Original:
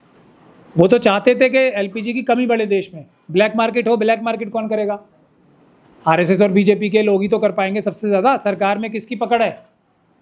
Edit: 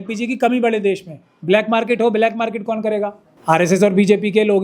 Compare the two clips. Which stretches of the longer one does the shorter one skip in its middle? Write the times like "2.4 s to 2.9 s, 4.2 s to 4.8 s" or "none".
5.1 s to 5.8 s